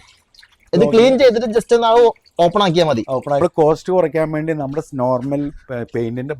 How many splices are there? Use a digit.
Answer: 1